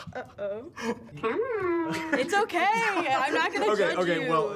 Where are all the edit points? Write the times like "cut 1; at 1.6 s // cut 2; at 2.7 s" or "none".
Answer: cut 1; at 1.1 s